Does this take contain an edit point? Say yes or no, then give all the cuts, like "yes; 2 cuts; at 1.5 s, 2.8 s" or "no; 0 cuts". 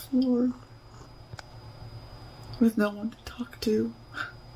yes; 1 cut; at 1.3 s